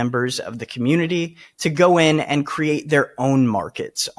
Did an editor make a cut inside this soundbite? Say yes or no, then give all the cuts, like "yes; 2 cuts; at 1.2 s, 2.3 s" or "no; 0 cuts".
no; 0 cuts